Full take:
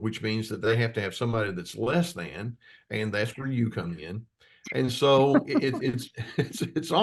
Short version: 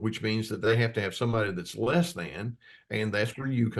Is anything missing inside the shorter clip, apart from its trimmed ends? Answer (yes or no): no